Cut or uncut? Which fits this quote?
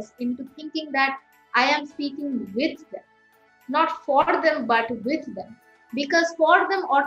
uncut